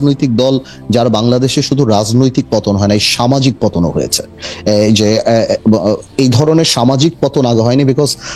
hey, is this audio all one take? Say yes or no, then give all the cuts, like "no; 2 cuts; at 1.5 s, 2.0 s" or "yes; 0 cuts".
yes; 0 cuts